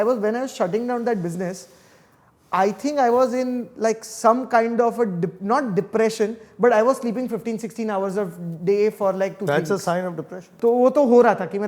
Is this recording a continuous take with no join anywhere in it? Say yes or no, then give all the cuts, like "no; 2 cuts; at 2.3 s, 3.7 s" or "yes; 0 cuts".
no; 1 cut; at 10.5 s